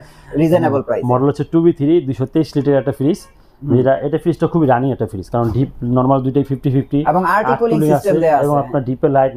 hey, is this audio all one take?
yes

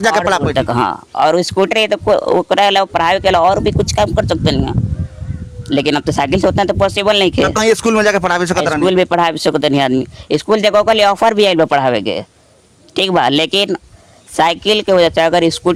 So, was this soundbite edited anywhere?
no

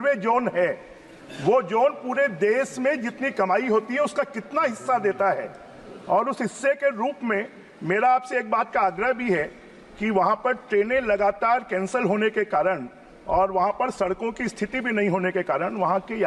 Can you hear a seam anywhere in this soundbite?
no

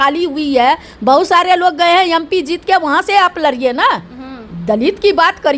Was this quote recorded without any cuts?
yes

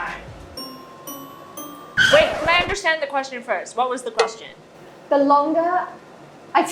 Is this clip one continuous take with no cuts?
yes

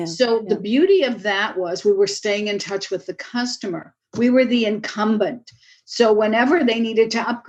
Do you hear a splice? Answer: no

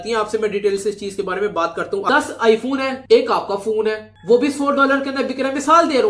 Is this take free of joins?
no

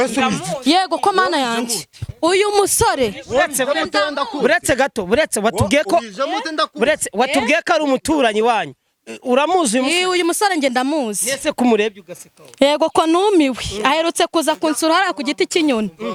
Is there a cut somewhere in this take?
no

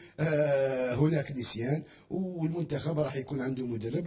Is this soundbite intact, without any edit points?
no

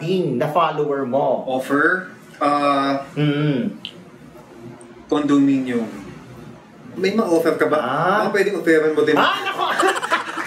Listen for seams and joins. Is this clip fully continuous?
no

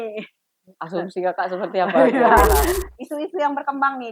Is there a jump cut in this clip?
yes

